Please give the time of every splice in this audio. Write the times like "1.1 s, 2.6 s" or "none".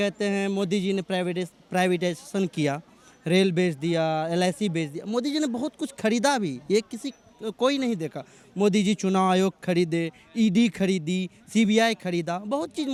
none